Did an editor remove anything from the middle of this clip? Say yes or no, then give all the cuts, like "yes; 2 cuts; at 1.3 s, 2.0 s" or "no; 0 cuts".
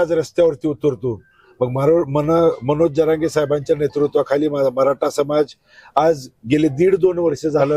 no; 0 cuts